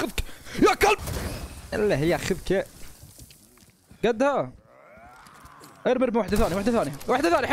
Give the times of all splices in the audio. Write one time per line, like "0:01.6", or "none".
none